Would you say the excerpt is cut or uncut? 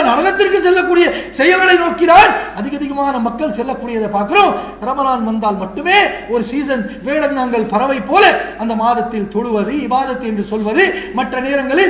uncut